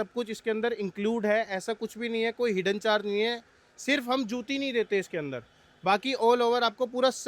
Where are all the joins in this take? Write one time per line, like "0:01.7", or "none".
none